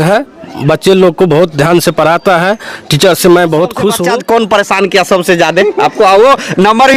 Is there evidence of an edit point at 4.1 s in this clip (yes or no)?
yes